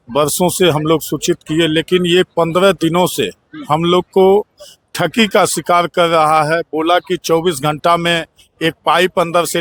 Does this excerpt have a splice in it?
no; 0 cuts

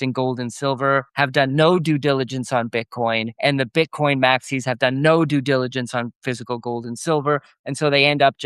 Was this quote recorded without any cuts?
yes; 0 cuts

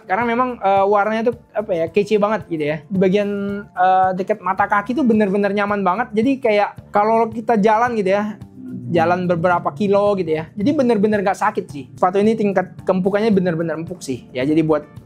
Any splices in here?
yes; 3 cuts; at 2.9 s, 6.8 s, 11.8 s

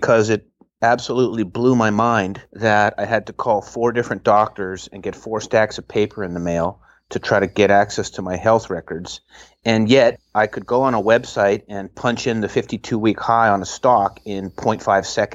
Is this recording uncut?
no; 2 cuts; at 2.4 s, 10.2 s

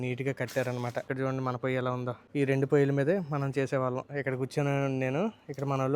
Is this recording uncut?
no; 2 cuts; at 1.1 s, 2.2 s

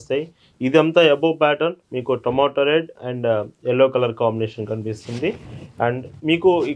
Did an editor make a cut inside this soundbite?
no; 0 cuts

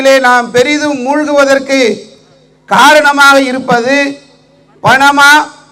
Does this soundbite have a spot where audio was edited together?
no; 0 cuts

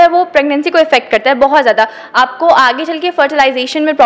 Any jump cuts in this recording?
no; 0 cuts

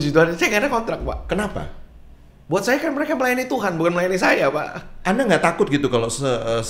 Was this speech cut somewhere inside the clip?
no; 0 cuts

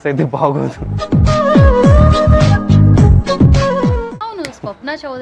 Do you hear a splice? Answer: yes; 1 cut; at 4.1 s

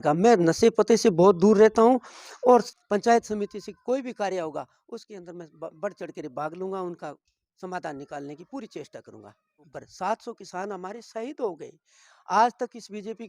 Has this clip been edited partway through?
yes; 2 cuts; at 2.8 s, 9.7 s

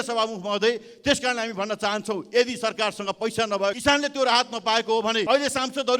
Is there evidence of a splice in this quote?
yes; 2 cuts; at 3.8 s, 5.2 s

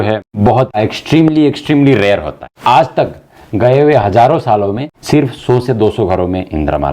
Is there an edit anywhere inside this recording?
yes; 3 cuts; at 0.8 s, 2.5 s, 4.9 s

